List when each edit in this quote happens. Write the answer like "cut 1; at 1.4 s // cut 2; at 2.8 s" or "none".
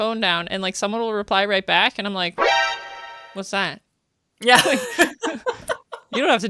none